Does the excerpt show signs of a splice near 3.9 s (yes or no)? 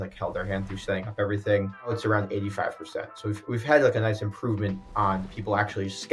no